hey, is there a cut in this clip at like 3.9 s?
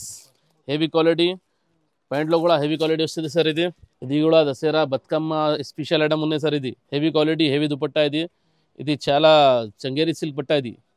yes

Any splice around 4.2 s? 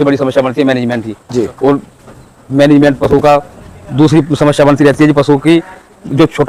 no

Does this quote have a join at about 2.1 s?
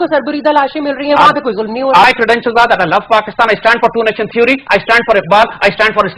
yes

